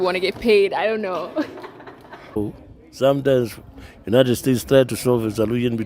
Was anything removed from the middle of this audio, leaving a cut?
yes; 1 cut; at 2.4 s

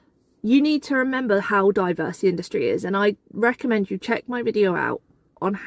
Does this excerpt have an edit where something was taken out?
no; 0 cuts

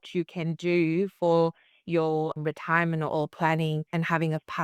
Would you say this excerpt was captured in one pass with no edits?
no; 1 cut; at 2.4 s

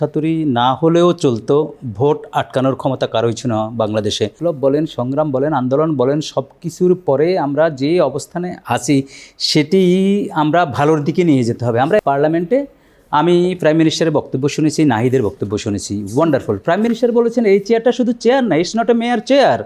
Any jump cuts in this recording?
yes; 2 cuts; at 4.4 s, 12.0 s

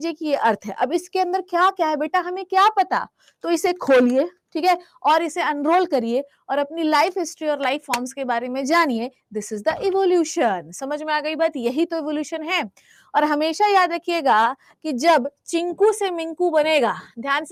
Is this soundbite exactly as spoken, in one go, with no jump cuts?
yes; 0 cuts

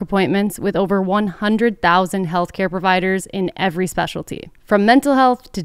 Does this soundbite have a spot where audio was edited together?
no; 0 cuts

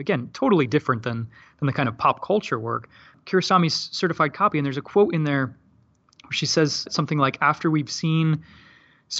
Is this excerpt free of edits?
yes; 0 cuts

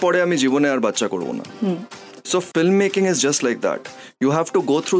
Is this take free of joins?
yes; 0 cuts

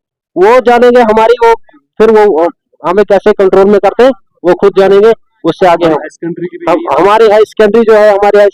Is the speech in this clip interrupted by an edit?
no; 0 cuts

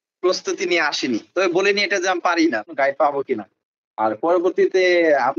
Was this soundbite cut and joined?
yes; 1 cut; at 2.7 s

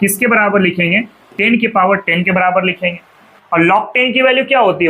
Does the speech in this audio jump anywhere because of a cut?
yes; 1 cut; at 3.3 s

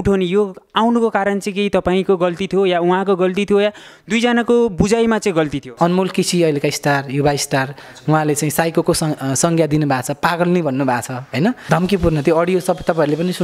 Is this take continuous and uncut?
no; 3 cuts; at 5.6 s, 7.9 s, 11.6 s

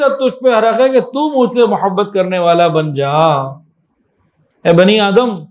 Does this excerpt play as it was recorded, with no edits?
yes; 0 cuts

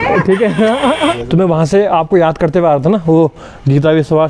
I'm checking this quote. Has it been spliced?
yes; 1 cut; at 1.2 s

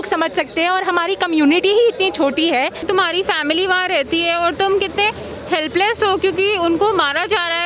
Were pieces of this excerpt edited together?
yes; 1 cut; at 2.9 s

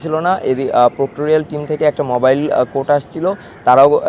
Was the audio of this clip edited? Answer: no; 0 cuts

